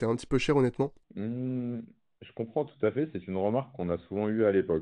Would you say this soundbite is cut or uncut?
cut